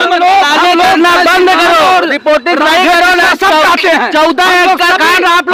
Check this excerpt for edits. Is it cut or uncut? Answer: uncut